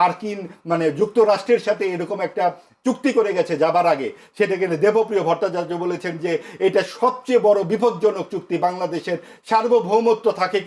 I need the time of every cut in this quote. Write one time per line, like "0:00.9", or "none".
none